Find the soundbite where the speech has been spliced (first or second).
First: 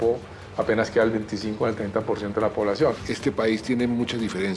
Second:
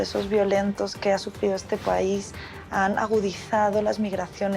first